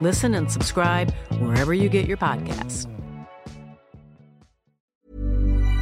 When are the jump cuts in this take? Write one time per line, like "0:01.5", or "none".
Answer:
0:04.9

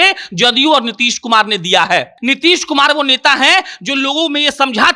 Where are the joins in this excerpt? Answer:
0:02.1

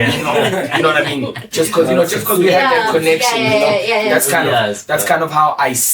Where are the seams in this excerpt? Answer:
none

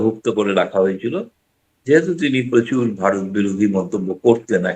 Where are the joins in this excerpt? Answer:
none

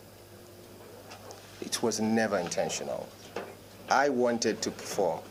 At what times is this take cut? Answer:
none

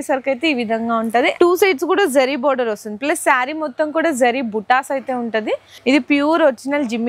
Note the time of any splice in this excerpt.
0:01.4
0:05.7

